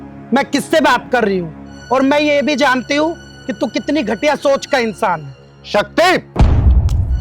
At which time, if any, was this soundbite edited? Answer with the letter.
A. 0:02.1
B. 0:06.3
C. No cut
B